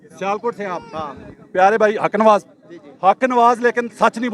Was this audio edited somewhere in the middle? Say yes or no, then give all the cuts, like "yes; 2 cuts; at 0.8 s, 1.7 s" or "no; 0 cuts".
no; 0 cuts